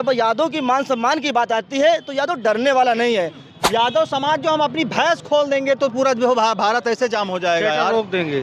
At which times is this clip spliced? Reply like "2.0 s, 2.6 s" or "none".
3.5 s